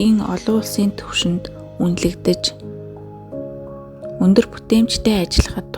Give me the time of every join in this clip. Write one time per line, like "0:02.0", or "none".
0:02.4
0:04.2